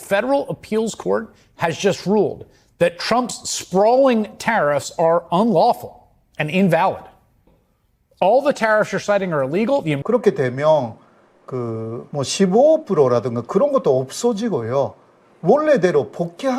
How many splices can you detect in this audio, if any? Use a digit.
3